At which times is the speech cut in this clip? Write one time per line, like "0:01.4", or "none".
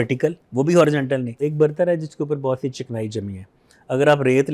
0:01.3